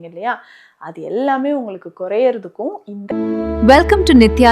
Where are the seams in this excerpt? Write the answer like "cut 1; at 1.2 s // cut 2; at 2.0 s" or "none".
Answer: cut 1; at 3.0 s